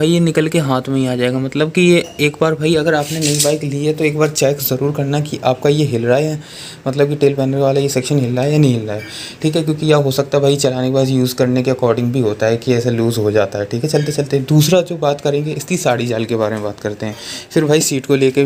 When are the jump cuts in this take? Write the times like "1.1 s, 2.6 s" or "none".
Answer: none